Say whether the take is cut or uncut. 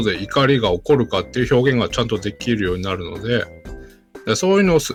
uncut